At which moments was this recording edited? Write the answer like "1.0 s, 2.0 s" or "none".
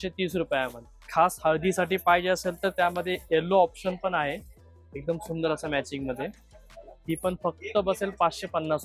1.1 s